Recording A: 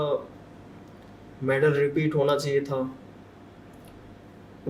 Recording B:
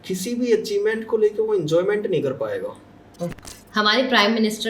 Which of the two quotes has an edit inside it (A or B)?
B